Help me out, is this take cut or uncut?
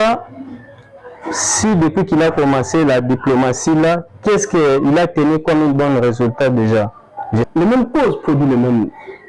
cut